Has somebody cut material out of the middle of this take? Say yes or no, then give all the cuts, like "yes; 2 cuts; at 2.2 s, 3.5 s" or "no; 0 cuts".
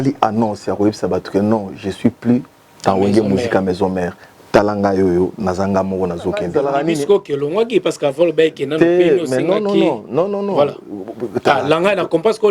yes; 1 cut; at 6.5 s